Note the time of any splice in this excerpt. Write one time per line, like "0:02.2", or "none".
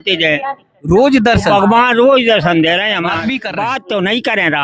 0:03.5